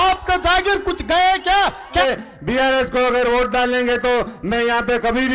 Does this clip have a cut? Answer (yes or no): yes